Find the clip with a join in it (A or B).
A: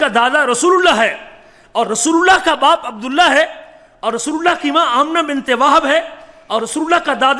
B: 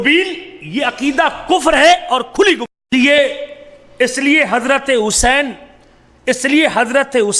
B